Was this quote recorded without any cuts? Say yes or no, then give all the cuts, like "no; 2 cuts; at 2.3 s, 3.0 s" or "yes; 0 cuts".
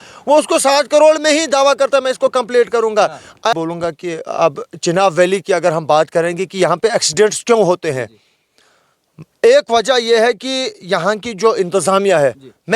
no; 1 cut; at 3.5 s